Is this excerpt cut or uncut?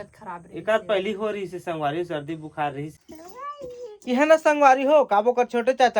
cut